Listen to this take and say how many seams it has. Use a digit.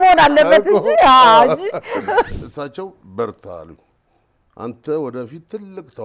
1